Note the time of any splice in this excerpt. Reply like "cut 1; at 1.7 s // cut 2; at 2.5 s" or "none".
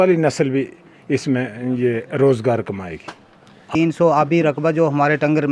cut 1; at 3.7 s